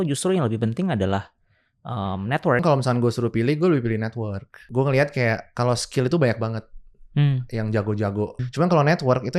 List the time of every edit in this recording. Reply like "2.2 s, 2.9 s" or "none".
2.6 s, 4.6 s, 8.4 s

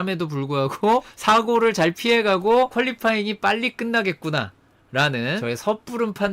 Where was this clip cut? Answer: 2.7 s, 5.4 s

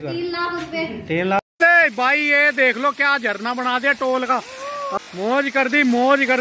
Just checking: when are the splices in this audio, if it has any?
1.4 s, 4.9 s

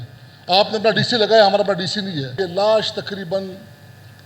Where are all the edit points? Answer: 2.3 s

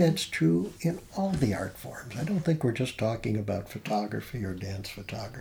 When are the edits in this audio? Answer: none

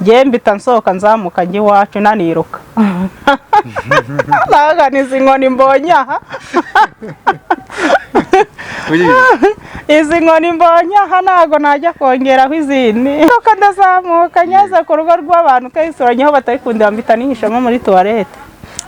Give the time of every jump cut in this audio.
13.3 s

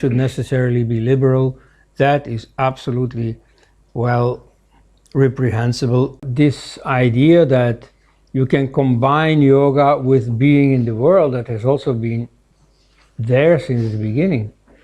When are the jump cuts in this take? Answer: 6.2 s

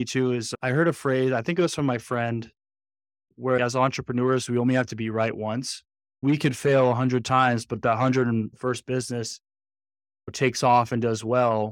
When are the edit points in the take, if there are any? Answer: 3.6 s, 6.2 s, 10.2 s

